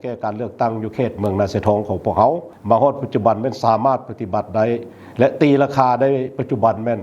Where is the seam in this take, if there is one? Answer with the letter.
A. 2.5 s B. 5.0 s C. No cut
A